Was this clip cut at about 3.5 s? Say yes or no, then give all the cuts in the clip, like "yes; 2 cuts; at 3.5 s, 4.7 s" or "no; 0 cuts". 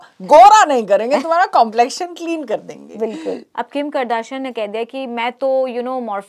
yes; 1 cut; at 3.5 s